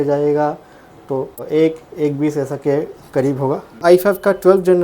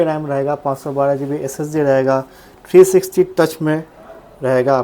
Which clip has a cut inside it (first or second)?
first